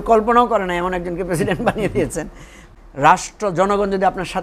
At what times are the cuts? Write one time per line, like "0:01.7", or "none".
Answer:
0:02.6